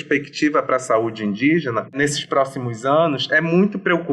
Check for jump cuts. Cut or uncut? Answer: cut